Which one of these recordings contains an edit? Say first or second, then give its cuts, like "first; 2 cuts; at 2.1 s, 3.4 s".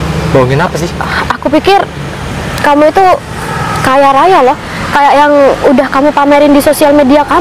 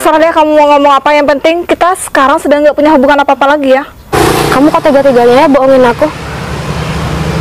second; 1 cut; at 4.1 s